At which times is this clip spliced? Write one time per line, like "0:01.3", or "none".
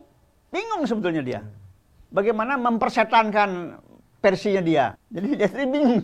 0:05.1